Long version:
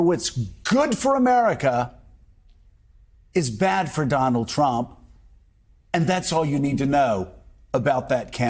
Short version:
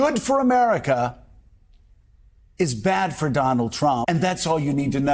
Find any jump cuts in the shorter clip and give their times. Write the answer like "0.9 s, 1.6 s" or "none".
4.0 s